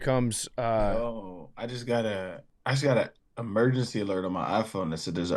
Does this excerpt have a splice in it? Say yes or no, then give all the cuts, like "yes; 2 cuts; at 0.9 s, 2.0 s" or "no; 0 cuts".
yes; 1 cut; at 2.5 s